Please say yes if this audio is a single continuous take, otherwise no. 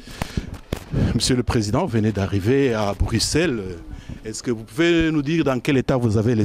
yes